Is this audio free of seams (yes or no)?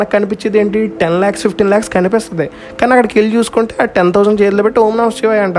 yes